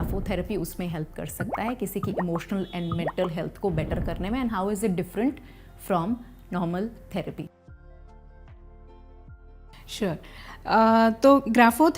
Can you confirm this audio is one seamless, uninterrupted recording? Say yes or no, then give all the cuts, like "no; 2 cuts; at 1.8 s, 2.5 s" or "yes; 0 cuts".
yes; 0 cuts